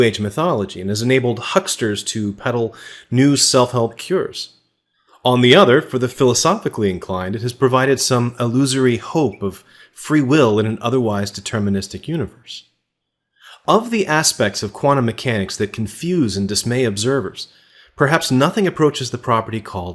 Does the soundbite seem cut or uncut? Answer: cut